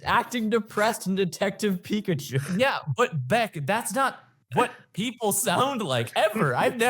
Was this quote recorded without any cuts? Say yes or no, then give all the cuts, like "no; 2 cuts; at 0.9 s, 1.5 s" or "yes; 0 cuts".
yes; 0 cuts